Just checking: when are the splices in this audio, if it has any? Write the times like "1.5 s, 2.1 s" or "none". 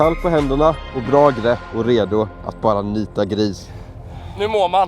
0.9 s, 1.7 s, 3.6 s

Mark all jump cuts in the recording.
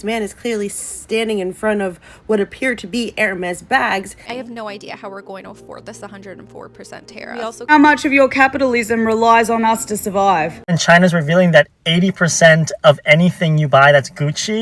4.2 s, 7.7 s, 10.8 s

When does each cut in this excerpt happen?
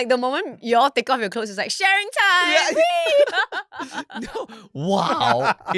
none

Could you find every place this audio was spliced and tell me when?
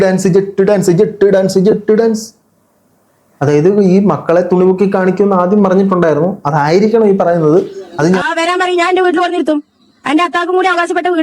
8.2 s

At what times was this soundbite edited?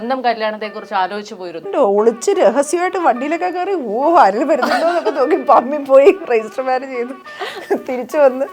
1.6 s

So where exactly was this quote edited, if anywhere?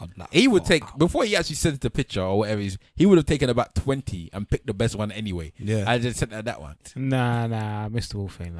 6.7 s

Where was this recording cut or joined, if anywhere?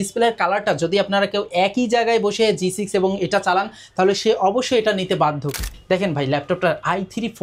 5.6 s

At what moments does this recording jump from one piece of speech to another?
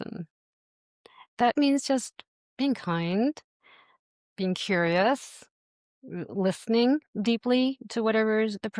1.3 s

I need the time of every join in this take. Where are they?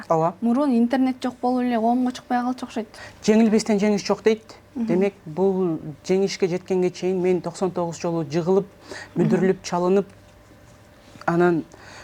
3.0 s

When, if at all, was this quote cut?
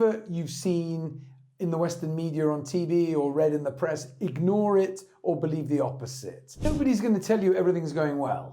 6.6 s

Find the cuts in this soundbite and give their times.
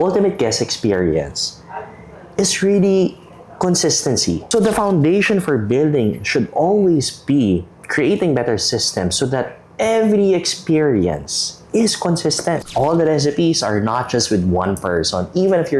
4.4 s, 12.6 s

